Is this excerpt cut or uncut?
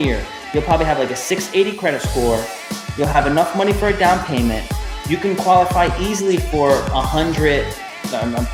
uncut